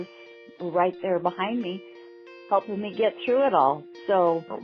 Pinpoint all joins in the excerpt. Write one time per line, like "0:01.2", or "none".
none